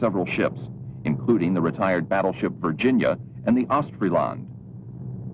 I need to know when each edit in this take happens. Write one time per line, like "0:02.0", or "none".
0:04.3